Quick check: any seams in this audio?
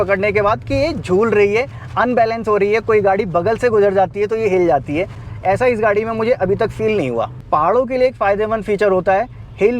no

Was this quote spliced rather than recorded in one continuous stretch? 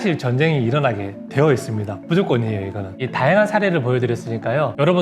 yes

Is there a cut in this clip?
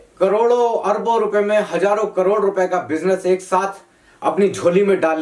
no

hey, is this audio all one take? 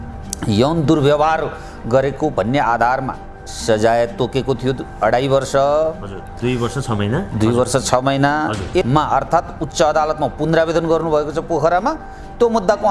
no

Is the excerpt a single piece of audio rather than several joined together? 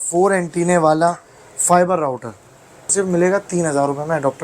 no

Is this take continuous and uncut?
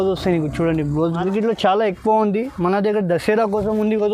no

